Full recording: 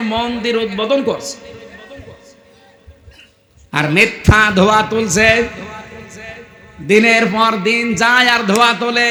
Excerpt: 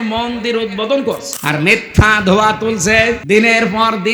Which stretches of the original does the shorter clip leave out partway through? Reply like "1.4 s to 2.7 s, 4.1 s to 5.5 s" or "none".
1.3 s to 3.6 s, 5.5 s to 6.8 s